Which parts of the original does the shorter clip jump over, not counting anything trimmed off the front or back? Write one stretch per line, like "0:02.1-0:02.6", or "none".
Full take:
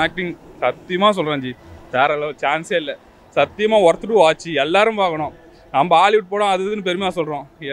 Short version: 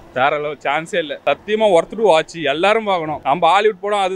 0:02.9-0:03.3
0:05.2-0:05.6